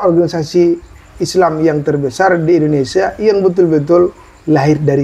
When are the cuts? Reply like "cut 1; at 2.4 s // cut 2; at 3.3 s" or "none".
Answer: none